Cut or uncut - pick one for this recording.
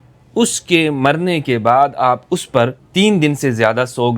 cut